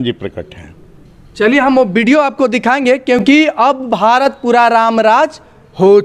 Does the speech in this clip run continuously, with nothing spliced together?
yes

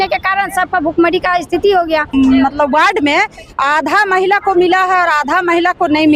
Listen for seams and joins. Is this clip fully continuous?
no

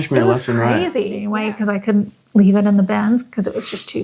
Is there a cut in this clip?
yes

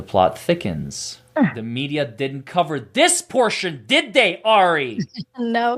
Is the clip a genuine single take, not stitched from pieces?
yes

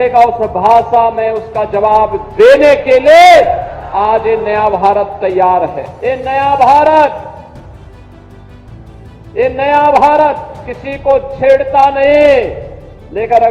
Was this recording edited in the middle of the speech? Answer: yes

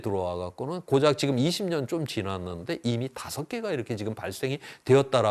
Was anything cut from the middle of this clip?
no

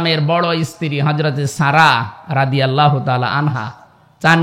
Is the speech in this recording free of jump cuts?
yes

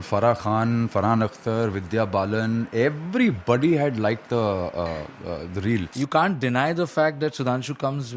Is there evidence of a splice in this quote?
yes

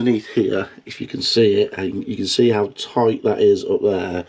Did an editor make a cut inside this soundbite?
no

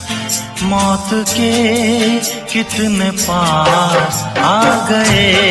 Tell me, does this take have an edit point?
no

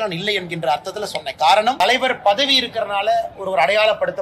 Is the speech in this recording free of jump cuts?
no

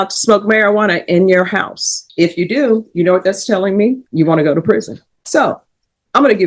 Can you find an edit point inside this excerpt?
no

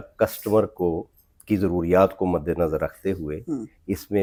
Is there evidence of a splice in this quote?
no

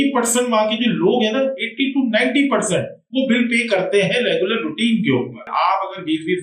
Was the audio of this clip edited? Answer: yes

